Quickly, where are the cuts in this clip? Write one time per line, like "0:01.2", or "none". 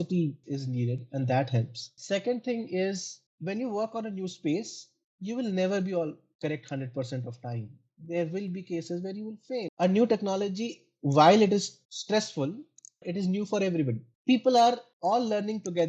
0:03.1
0:09.7
0:13.0
0:14.1